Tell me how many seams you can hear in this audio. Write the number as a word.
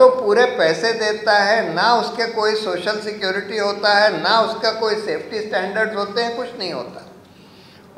zero